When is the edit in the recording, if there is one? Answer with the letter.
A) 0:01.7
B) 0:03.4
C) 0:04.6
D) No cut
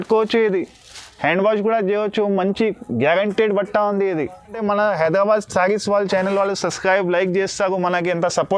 C